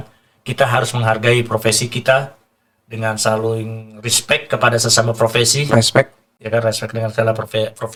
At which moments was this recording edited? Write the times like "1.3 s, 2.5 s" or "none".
none